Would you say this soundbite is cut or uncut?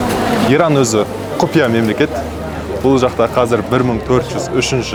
uncut